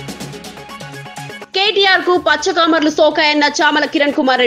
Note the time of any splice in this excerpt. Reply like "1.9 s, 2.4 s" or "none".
1.4 s